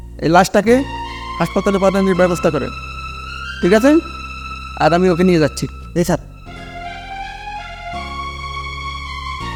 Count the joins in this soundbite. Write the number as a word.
zero